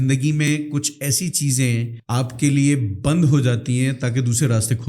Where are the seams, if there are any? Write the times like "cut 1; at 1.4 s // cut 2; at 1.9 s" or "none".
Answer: cut 1; at 2.0 s